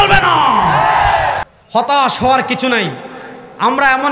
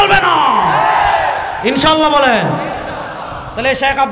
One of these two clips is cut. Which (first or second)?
first